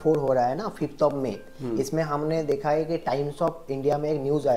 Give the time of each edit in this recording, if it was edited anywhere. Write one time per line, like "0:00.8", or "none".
none

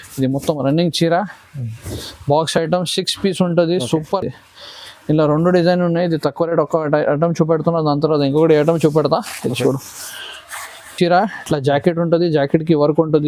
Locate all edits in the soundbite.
none

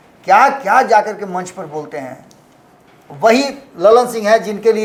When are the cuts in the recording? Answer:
none

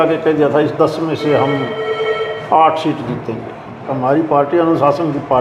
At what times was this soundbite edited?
0:03.8

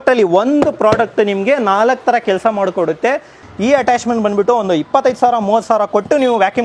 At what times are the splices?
0:03.4

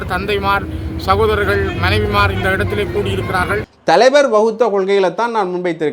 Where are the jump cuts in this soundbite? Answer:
0:03.7

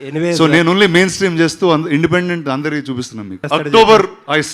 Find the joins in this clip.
0:03.4

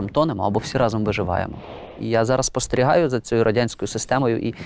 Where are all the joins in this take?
0:02.0

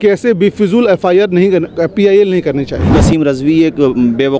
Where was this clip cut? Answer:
0:02.9

